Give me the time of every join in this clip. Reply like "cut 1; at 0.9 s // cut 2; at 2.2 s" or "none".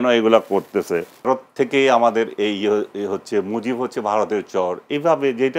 cut 1; at 1.3 s